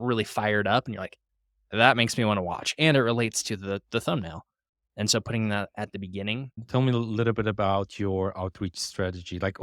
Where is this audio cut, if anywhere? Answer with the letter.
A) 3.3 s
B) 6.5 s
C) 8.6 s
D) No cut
B